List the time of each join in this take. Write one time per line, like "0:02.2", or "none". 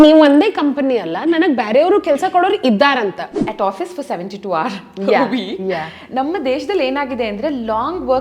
0:03.4